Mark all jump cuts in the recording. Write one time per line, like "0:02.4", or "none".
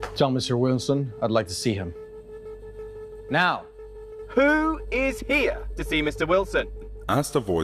none